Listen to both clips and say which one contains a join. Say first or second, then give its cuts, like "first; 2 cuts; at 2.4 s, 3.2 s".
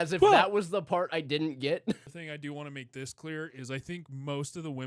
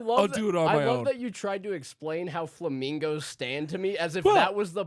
first; 1 cut; at 2.0 s